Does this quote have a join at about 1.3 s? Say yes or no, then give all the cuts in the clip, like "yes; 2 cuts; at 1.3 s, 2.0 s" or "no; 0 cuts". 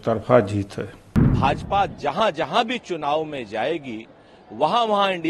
yes; 1 cut; at 1.3 s